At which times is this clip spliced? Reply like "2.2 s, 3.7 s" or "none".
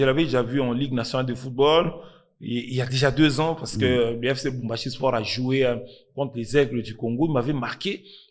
none